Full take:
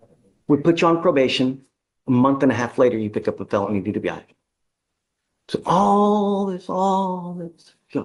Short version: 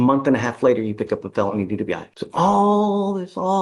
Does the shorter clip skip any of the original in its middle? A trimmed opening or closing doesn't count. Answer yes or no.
yes